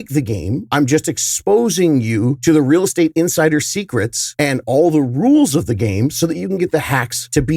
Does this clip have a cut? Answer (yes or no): no